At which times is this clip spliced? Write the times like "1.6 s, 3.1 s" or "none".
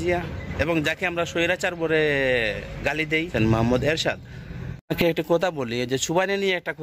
3.3 s, 4.9 s